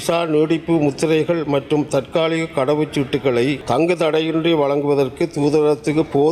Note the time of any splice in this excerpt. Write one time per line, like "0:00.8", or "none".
0:03.6